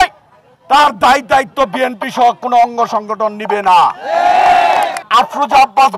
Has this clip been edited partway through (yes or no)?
yes